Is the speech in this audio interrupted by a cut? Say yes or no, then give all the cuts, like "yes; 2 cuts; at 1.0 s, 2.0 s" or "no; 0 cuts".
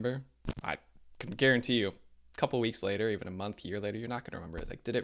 no; 0 cuts